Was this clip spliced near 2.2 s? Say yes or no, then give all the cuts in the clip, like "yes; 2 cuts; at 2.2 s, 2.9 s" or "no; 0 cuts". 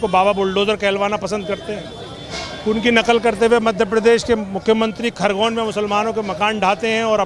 no; 0 cuts